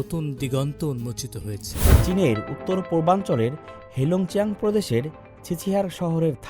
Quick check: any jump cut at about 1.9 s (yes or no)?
yes